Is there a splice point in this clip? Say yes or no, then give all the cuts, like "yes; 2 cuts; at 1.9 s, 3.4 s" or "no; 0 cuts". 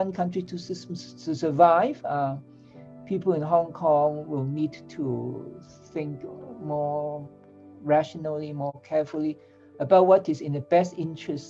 no; 0 cuts